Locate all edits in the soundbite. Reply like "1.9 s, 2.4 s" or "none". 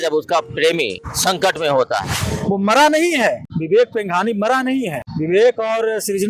1.1 s, 2.2 s, 3.5 s, 5.0 s